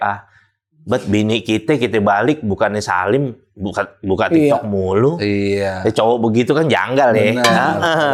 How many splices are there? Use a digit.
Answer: 0